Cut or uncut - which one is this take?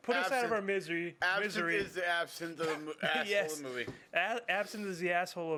uncut